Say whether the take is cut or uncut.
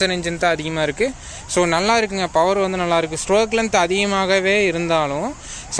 uncut